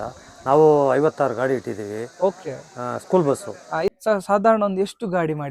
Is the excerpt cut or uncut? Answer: cut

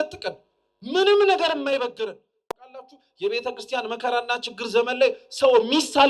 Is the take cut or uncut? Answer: cut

